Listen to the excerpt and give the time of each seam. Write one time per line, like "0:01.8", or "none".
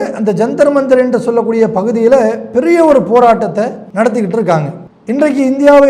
0:03.8